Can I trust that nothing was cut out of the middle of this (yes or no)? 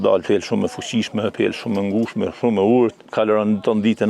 no